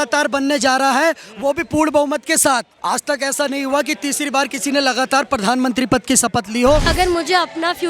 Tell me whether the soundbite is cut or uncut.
cut